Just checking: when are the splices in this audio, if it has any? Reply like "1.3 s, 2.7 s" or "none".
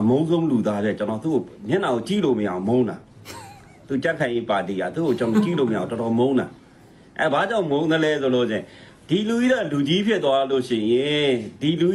none